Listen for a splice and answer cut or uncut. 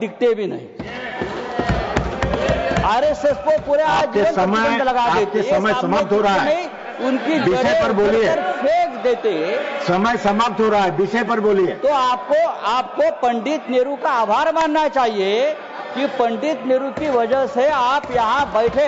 uncut